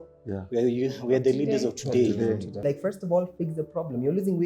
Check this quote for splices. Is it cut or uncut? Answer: cut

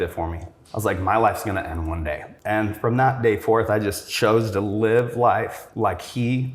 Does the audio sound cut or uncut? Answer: cut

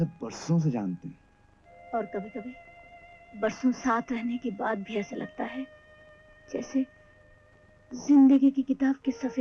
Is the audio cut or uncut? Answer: uncut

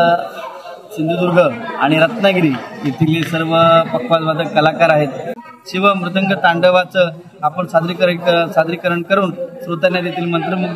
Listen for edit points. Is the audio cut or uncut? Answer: cut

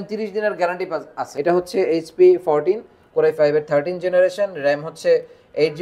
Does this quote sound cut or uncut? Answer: cut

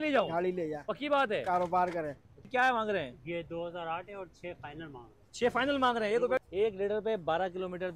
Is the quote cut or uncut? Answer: cut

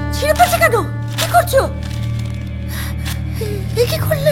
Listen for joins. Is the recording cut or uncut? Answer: uncut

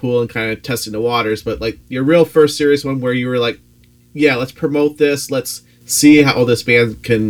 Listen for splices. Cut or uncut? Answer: uncut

